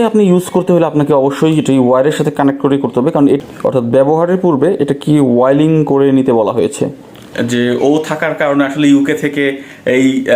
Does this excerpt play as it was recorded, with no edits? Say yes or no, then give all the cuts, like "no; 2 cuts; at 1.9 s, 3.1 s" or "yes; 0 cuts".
no; 2 cuts; at 3.4 s, 7.3 s